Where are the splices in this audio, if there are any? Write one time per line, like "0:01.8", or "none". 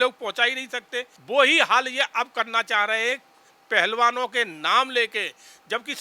0:01.1